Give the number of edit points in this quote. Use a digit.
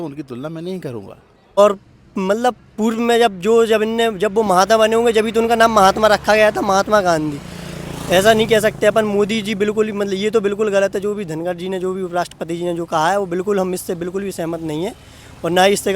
1